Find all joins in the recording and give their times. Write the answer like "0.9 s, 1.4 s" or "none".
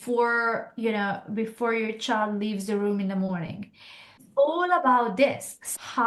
4.2 s